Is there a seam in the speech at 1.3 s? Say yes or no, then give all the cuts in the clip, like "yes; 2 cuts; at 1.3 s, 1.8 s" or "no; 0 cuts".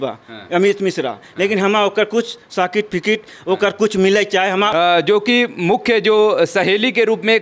no; 1 cut; at 4.7 s